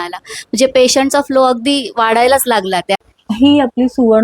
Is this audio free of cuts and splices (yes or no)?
no